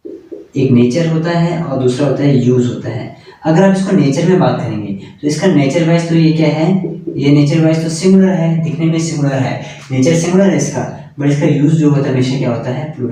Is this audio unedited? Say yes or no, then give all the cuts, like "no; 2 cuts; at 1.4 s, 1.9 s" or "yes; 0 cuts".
yes; 0 cuts